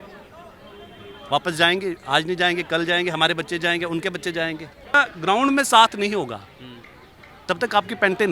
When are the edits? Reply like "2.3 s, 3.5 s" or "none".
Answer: 4.9 s